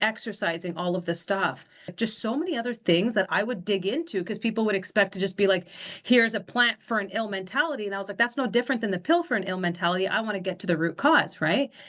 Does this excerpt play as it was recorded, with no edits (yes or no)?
no